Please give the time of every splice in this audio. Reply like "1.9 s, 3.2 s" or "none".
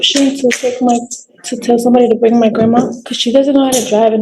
3.0 s